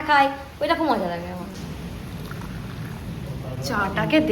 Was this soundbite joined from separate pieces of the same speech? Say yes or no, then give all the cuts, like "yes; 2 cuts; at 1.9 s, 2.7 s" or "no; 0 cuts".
no; 0 cuts